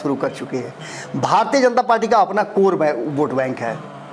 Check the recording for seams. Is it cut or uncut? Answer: uncut